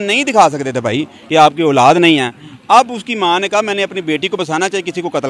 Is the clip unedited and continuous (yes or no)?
no